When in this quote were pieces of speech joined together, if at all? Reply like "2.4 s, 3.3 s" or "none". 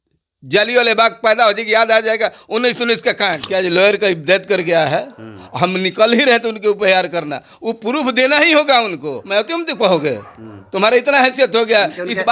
3.4 s, 9.3 s

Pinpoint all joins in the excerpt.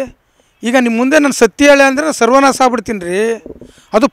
none

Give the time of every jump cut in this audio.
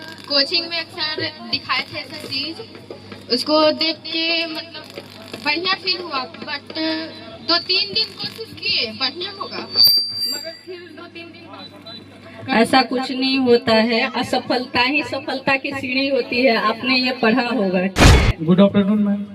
18.1 s

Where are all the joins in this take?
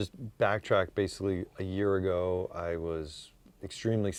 none

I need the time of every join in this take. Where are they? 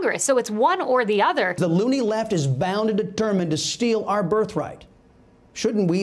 1.6 s

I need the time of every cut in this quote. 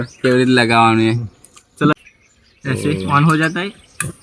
1.9 s

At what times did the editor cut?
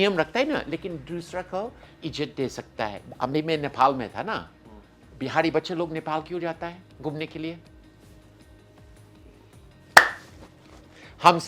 3.1 s

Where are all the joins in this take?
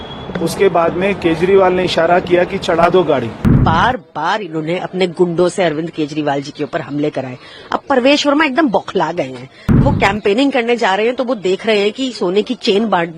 3.6 s, 9.8 s

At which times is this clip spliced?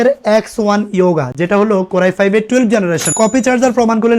3.1 s

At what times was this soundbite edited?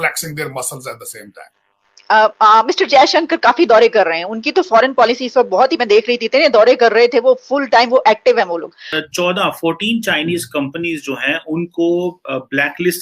1.5 s, 8.8 s

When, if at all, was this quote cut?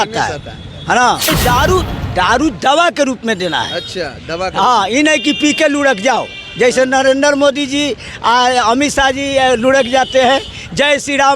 1.3 s

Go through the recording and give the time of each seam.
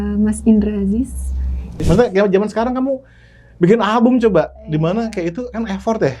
1.7 s

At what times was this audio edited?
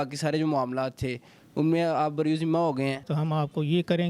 3.1 s

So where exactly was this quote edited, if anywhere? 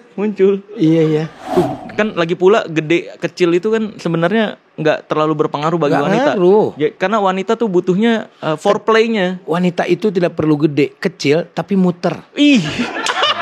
1.4 s

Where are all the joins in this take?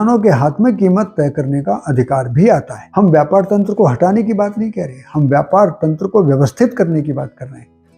2.8 s

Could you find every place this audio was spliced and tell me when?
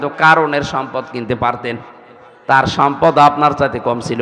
none

